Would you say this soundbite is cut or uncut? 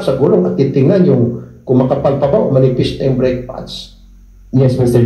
uncut